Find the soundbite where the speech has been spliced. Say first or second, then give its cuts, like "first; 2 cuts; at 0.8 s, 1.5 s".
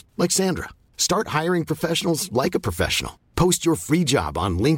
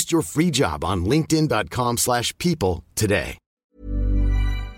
second; 1 cut; at 3.5 s